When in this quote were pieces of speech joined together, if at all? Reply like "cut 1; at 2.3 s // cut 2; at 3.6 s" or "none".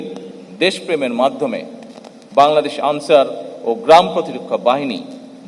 none